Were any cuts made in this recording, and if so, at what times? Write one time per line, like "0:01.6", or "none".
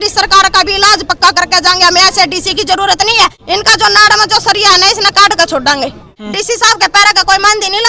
0:03.4
0:06.2